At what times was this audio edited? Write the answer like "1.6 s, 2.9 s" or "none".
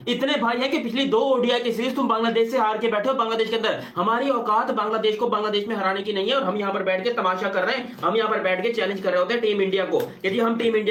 none